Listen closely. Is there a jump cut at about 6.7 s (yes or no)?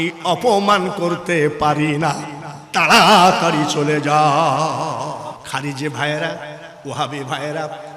no